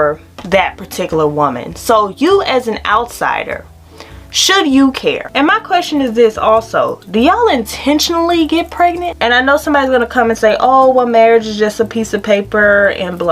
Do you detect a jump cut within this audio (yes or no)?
yes